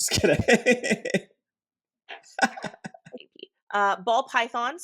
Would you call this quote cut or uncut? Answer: cut